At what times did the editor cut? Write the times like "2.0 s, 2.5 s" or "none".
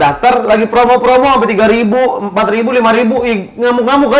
none